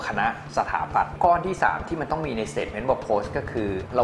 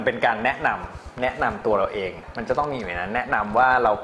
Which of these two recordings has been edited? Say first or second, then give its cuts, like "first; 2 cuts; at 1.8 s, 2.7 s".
first; 1 cut; at 1.1 s